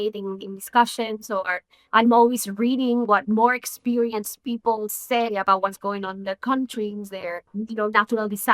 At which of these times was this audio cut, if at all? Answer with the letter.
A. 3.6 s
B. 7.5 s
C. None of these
B